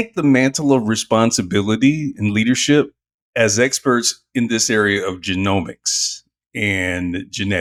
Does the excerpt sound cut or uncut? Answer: uncut